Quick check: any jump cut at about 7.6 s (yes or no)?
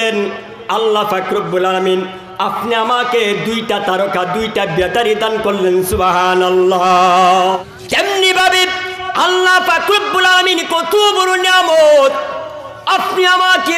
yes